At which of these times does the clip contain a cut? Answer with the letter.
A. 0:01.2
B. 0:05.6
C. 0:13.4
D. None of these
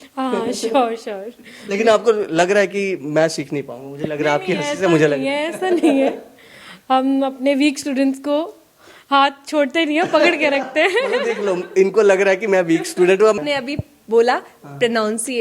C